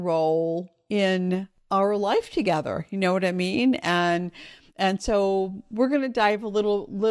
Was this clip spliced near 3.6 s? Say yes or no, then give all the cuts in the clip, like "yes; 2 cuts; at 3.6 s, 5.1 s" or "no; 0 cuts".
no; 1 cut; at 1.5 s